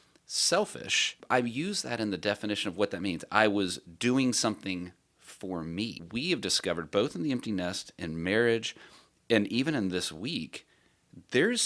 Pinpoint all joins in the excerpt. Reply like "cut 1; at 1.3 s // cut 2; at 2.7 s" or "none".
cut 1; at 1.2 s // cut 2; at 6.0 s